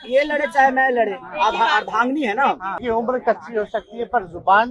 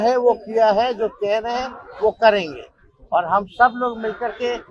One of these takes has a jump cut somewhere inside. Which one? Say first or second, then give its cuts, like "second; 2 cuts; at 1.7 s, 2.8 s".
first; 1 cut; at 2.7 s